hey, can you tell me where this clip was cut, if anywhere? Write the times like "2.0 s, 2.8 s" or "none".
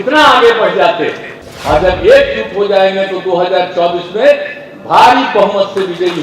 1.3 s